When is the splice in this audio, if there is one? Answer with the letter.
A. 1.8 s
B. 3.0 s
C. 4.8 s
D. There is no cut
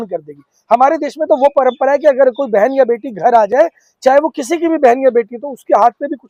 D